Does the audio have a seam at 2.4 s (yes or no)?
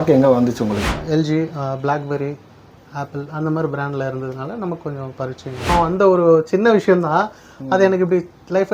no